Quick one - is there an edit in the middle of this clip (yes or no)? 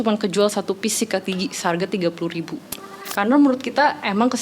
yes